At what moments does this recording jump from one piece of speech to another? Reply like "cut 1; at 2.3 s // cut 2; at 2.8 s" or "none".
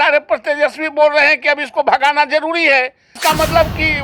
cut 1; at 3.1 s